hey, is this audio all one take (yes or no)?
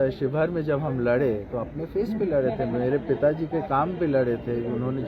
yes